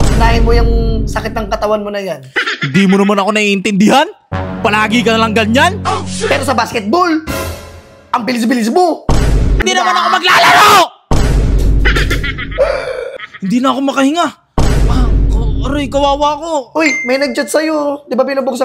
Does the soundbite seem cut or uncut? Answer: cut